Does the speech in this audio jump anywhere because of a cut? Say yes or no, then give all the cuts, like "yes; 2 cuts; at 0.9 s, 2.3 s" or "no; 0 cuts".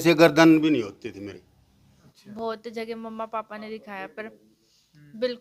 yes; 1 cut; at 2.0 s